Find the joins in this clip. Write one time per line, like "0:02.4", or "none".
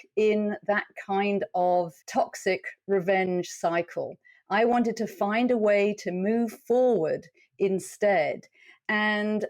0:02.0